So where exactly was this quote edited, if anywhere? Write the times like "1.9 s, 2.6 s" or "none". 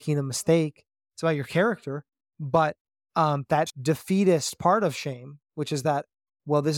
3.8 s